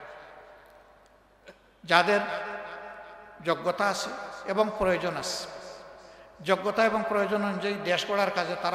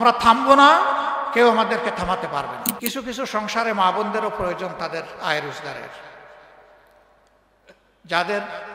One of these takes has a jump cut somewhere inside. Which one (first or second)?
second